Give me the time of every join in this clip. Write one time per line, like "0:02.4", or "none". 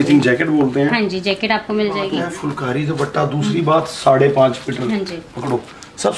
0:02.1